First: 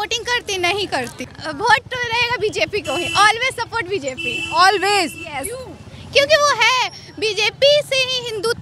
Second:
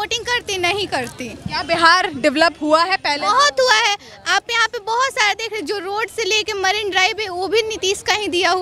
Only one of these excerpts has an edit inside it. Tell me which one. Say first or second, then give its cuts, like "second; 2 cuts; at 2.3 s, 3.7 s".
first; 1 cut; at 1.4 s